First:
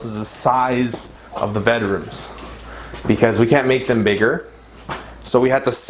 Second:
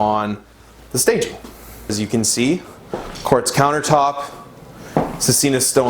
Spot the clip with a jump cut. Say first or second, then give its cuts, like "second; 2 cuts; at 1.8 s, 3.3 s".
second; 1 cut; at 1.9 s